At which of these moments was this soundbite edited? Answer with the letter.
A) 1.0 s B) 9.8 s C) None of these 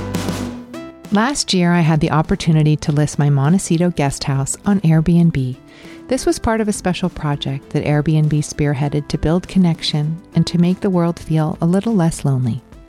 A